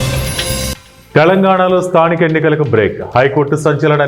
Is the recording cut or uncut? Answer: uncut